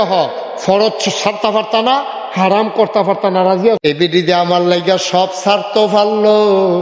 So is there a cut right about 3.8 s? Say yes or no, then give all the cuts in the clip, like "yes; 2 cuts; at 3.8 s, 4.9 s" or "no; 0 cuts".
yes; 1 cut; at 3.8 s